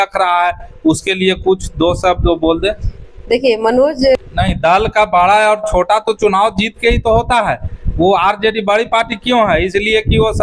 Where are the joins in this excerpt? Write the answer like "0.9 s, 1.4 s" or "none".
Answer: 4.2 s